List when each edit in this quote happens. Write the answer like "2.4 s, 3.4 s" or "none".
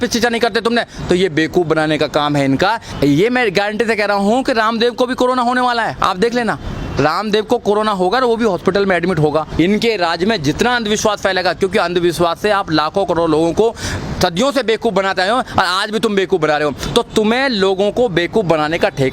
2.9 s, 9.5 s